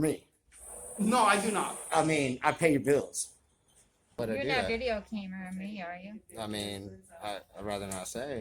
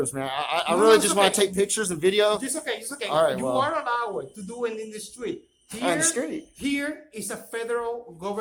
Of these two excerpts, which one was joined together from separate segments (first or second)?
first